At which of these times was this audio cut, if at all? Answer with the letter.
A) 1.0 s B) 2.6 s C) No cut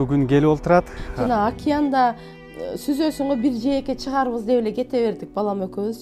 A